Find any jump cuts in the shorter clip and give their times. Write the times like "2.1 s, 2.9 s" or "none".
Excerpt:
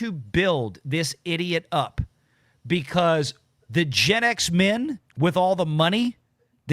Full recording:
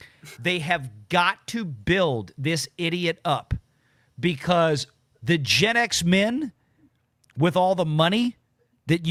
5.0 s